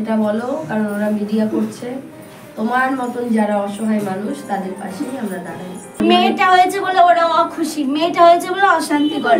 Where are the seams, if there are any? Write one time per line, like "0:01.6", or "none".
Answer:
0:06.0

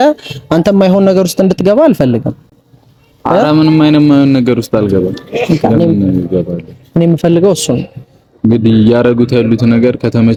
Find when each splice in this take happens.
none

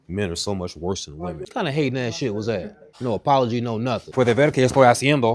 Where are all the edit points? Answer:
0:01.4
0:02.8
0:04.1

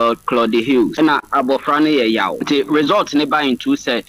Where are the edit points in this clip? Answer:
0:00.9
0:02.4

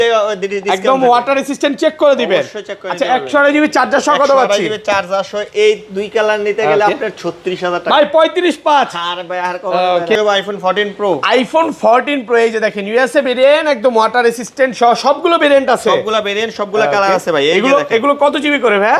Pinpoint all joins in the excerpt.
0:10.2

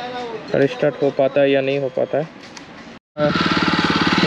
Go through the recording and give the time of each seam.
0:02.9

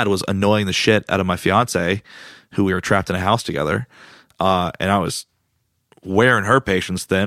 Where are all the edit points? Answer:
none

